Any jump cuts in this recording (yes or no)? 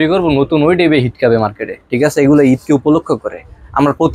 no